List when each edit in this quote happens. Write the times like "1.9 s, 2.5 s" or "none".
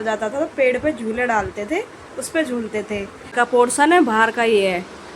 3.2 s